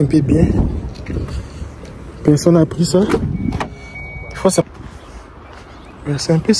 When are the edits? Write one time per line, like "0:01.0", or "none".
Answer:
0:04.6